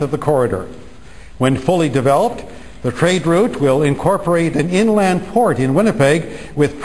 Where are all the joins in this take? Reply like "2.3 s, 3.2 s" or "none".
1.0 s